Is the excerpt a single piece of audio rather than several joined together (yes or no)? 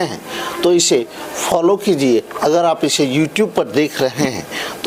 yes